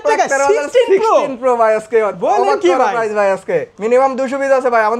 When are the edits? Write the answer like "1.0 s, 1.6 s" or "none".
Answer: 3.7 s